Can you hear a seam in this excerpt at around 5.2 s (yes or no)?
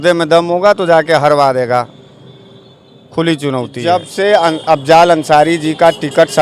no